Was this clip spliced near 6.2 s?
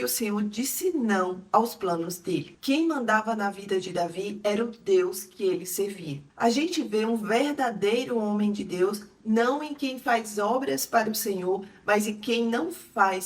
yes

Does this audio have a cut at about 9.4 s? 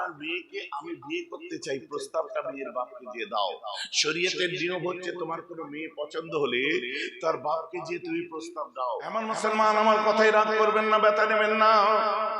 yes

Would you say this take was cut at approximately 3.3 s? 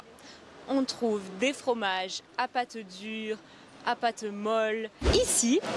yes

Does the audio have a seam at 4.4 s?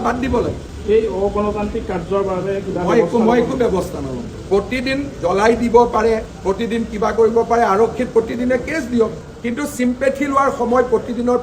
yes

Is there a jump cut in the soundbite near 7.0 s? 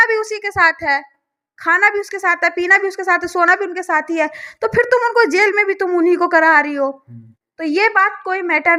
no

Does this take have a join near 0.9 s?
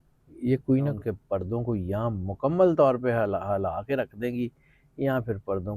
yes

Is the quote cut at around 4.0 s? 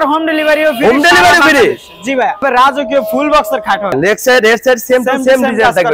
yes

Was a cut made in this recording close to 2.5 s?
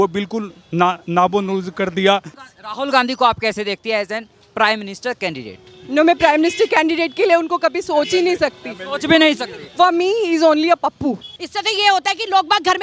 yes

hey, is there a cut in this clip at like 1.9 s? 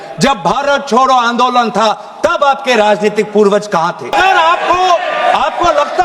no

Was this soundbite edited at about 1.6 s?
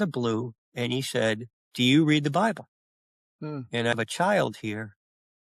yes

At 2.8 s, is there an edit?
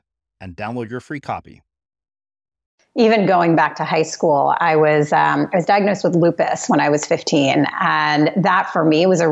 yes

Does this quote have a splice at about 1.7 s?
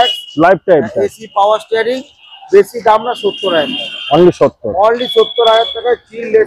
no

